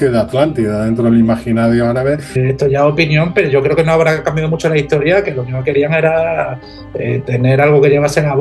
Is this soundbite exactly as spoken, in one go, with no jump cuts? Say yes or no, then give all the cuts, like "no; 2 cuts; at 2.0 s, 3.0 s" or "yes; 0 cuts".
no; 1 cut; at 2.3 s